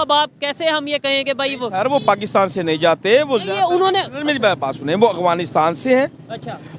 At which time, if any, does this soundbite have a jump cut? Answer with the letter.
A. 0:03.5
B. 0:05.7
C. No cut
C